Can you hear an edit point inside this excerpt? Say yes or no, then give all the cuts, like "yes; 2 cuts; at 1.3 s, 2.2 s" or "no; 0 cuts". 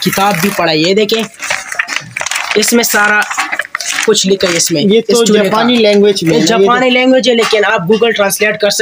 no; 0 cuts